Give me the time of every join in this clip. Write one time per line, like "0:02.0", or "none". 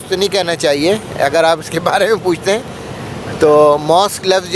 none